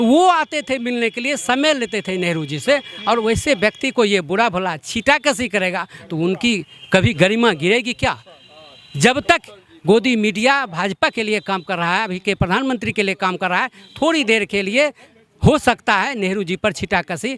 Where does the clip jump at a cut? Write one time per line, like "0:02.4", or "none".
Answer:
none